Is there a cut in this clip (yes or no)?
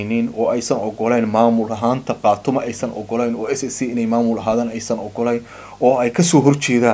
no